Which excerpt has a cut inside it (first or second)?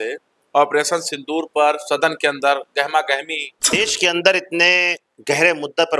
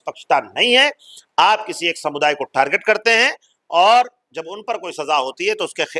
first